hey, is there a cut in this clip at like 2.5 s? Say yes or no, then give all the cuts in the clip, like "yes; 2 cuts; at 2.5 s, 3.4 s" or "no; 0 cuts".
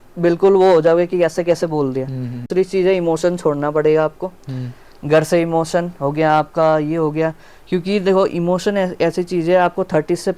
yes; 1 cut; at 2.5 s